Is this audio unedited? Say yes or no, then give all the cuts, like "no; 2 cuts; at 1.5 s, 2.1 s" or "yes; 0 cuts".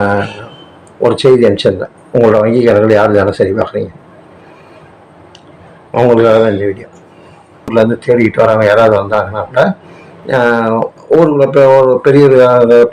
no; 1 cut; at 7.7 s